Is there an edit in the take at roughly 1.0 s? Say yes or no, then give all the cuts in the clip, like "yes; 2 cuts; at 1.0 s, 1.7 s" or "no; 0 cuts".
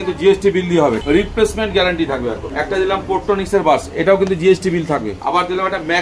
yes; 3 cuts; at 1.0 s, 2.5 s, 5.1 s